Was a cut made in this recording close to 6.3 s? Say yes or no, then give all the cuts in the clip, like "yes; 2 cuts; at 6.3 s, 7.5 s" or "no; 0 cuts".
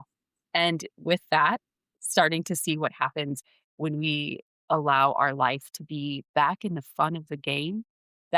no; 1 cut; at 2.0 s